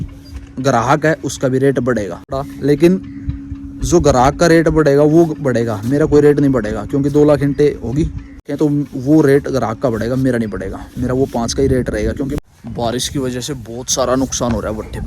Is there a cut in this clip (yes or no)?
yes